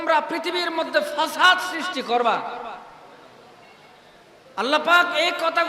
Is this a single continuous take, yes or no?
yes